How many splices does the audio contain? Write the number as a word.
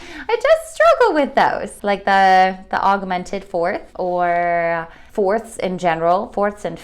three